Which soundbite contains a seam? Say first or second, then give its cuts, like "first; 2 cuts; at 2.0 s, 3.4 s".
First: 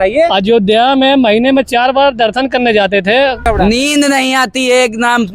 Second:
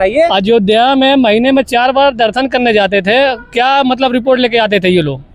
first; 1 cut; at 3.5 s